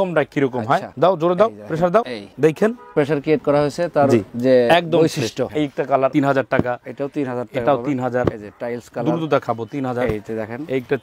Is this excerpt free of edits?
no; 2 cuts; at 3.0 s, 5.5 s

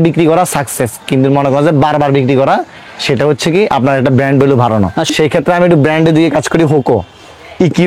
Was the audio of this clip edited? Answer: no; 0 cuts

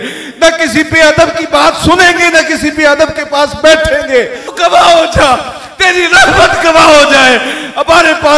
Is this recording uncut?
no; 1 cut; at 4.5 s

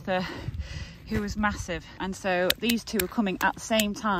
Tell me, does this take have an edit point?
yes; 1 cut; at 1.9 s

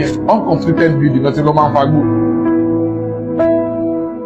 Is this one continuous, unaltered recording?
yes; 0 cuts

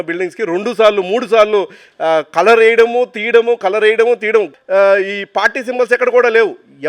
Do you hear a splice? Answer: yes; 1 cut; at 4.5 s

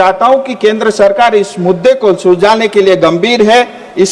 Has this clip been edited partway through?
no; 0 cuts

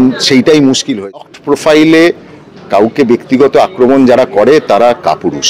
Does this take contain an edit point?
yes; 1 cut; at 0.9 s

